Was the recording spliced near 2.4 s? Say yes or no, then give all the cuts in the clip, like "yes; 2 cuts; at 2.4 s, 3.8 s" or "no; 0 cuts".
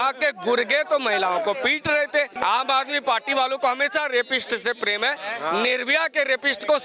yes; 1 cut; at 2.4 s